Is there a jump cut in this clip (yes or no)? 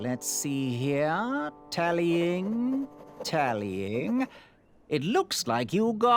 no